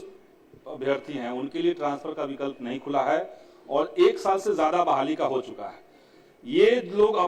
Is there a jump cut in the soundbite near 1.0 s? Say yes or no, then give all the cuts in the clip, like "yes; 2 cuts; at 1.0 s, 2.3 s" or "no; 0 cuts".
no; 0 cuts